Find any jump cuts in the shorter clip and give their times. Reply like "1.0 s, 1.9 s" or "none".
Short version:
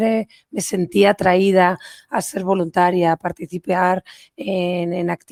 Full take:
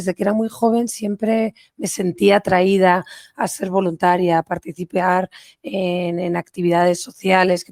none